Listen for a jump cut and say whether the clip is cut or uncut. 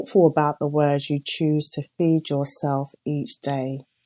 uncut